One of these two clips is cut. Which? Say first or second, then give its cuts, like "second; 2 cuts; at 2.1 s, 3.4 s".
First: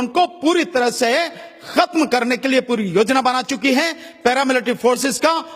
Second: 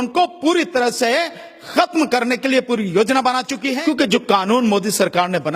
second; 1 cut; at 3.6 s